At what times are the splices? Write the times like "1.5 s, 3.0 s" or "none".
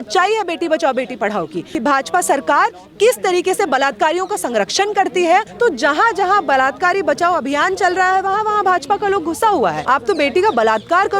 1.6 s, 5.5 s, 9.8 s